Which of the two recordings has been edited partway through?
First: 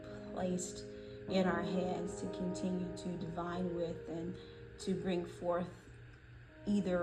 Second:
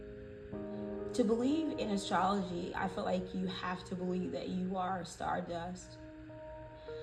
second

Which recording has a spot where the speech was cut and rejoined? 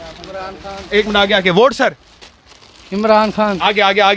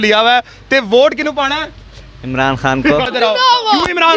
second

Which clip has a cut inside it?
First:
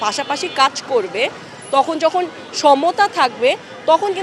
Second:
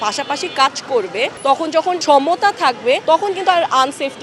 second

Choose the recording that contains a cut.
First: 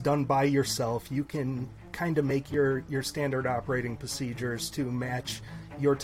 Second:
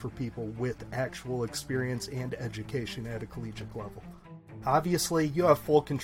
second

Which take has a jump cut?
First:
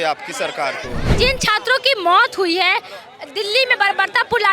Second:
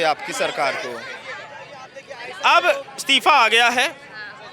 first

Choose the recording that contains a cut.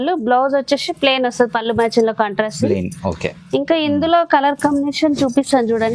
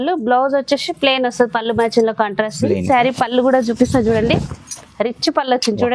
second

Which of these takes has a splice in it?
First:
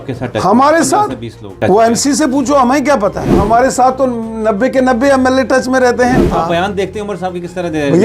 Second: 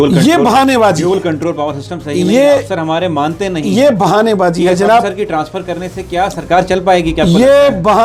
first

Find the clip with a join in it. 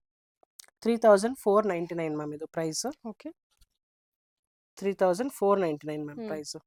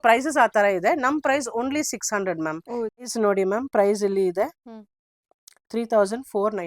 second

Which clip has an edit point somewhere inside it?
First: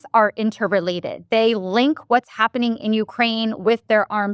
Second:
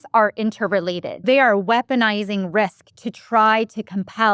second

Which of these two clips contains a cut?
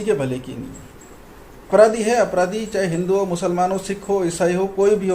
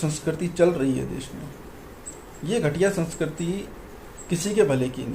first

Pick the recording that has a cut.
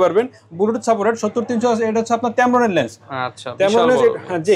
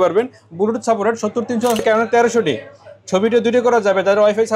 second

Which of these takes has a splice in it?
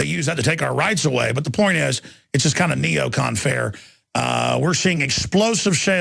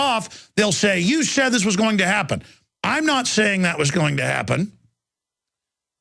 first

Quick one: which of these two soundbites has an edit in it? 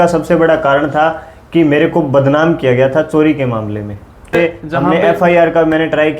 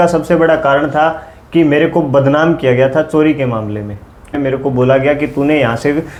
first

